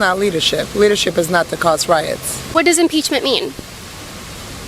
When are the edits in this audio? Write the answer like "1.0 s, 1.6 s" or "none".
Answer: 2.4 s